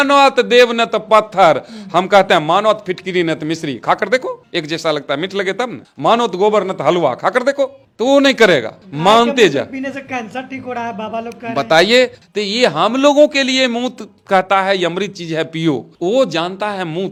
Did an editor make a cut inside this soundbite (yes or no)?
no